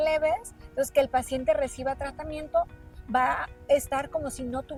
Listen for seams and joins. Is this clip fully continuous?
yes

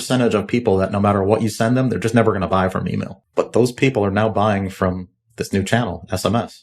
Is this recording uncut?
no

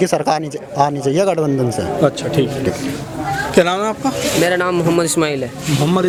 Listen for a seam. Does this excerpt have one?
no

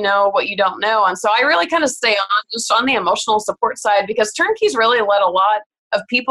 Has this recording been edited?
no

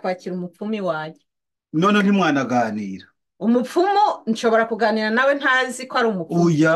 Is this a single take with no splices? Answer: yes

